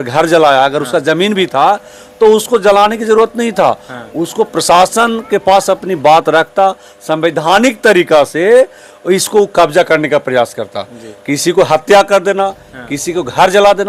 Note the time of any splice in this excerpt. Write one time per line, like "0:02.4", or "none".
none

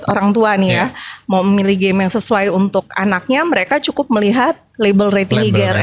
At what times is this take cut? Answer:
none

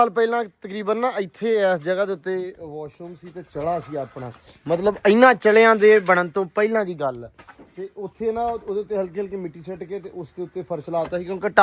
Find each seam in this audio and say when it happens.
none

